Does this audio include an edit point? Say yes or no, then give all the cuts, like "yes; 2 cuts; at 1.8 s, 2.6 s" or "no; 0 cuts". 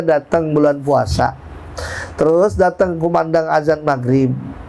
no; 0 cuts